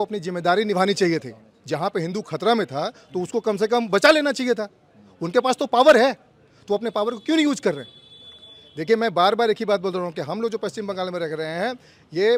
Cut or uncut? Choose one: uncut